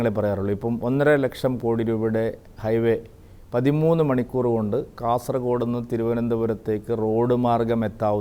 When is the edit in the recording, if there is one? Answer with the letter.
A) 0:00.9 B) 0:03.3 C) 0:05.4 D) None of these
D